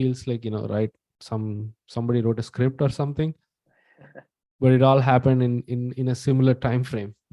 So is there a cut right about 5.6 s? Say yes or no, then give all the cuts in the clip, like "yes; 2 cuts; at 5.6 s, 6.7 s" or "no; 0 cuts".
no; 0 cuts